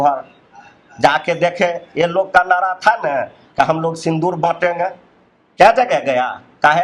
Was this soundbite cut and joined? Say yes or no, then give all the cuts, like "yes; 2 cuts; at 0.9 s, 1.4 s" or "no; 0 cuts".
no; 0 cuts